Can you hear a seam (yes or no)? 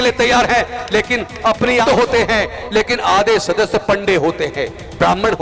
yes